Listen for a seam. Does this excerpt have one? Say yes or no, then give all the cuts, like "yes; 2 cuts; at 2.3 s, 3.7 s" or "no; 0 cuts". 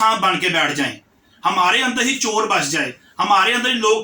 no; 0 cuts